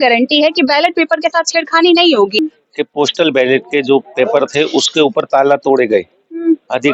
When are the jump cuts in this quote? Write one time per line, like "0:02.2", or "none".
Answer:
0:02.4